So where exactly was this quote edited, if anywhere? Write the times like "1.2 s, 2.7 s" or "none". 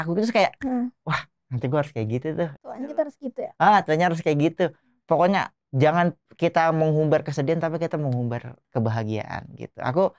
8.5 s